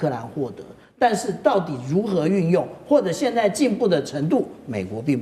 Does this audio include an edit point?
no; 0 cuts

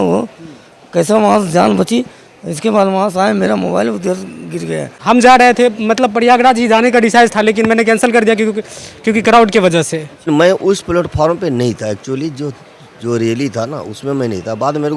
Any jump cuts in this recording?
yes; 2 cuts; at 4.9 s, 10.2 s

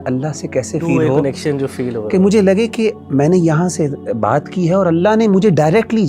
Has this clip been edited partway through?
no; 0 cuts

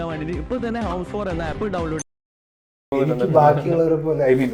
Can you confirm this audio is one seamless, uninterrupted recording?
no; 1 cut; at 2.9 s

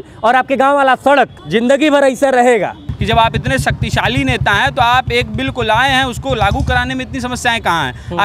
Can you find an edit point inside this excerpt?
yes; 2 cuts; at 1.4 s, 2.9 s

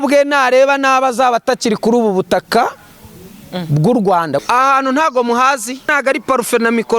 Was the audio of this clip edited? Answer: yes; 2 cuts; at 4.4 s, 5.9 s

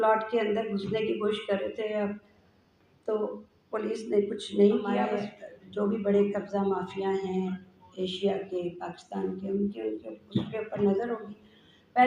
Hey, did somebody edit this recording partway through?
yes; 1 cut; at 5.1 s

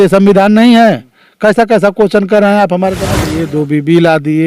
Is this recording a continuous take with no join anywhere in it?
no; 1 cut; at 3.2 s

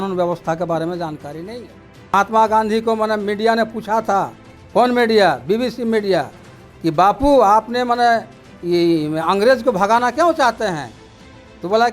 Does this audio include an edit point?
yes; 1 cut; at 2.1 s

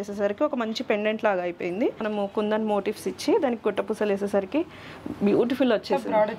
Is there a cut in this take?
yes; 1 cut; at 2.0 s

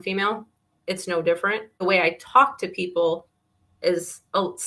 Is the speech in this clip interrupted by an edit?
yes; 1 cut; at 1.8 s

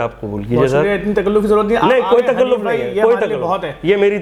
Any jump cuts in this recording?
no; 0 cuts

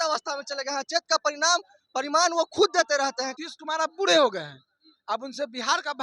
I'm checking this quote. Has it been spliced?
yes; 1 cut; at 3.3 s

